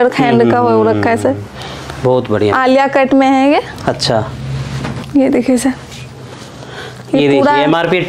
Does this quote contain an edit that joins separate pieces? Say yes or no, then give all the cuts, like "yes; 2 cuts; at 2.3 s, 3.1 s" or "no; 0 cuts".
no; 0 cuts